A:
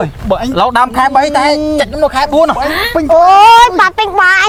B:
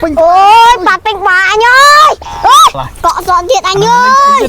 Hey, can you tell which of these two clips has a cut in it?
B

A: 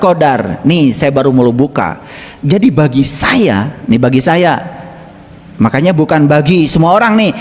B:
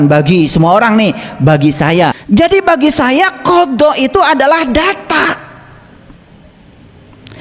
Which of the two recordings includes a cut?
B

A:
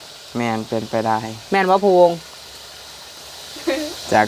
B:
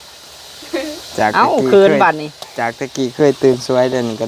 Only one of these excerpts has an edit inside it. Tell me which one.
A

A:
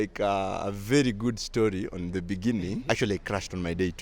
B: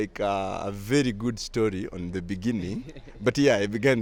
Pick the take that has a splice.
A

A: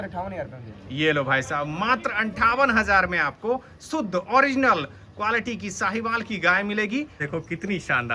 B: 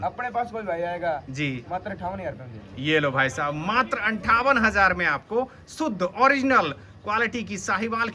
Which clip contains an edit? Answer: A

